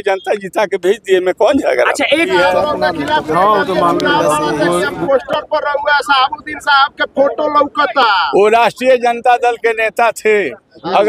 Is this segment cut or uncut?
cut